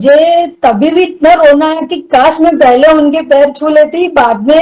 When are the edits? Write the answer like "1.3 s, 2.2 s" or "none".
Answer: none